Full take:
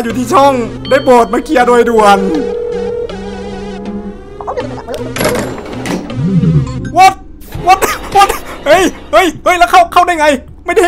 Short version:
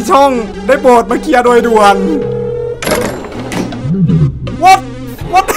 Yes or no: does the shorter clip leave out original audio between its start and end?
yes